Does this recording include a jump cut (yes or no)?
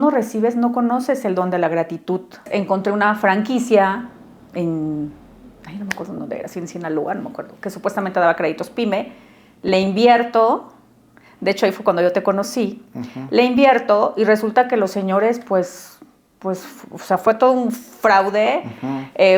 yes